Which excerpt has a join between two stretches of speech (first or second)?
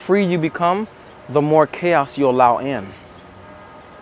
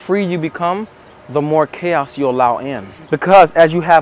second